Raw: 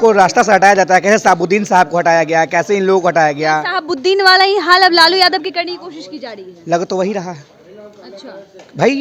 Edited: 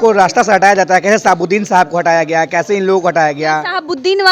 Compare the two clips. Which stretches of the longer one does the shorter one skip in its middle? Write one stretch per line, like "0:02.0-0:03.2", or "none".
none